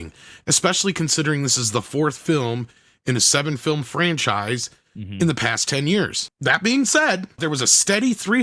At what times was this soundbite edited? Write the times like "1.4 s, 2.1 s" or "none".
6.2 s, 7.4 s